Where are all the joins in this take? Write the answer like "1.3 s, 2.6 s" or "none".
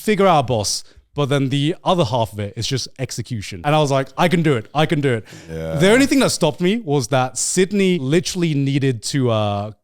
3.5 s, 8.0 s